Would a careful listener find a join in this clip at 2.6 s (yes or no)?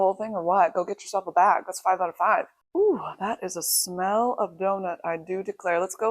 yes